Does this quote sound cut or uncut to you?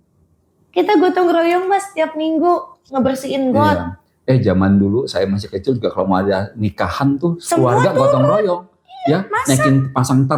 uncut